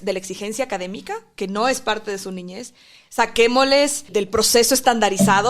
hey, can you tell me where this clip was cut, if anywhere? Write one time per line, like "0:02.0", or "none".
0:04.1